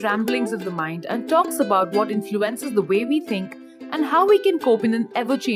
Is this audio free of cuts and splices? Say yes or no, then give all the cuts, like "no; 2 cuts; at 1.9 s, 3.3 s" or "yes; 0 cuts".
yes; 0 cuts